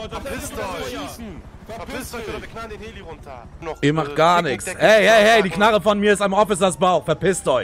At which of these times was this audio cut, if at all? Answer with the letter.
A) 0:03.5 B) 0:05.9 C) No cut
A